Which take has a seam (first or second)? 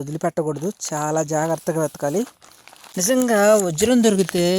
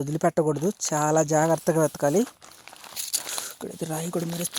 first